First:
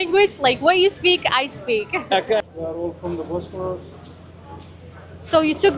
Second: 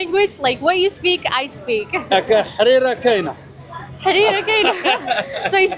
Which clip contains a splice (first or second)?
first